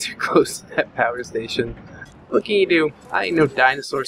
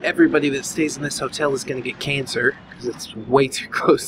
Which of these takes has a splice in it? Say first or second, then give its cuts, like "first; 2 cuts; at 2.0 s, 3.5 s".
first; 2 cuts; at 1.6 s, 3.1 s